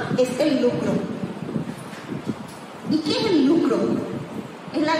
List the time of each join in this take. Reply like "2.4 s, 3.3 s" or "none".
none